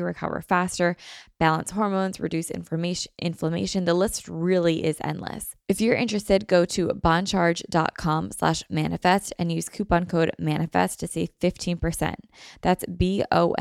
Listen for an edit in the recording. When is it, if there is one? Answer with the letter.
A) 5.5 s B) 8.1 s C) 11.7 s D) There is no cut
A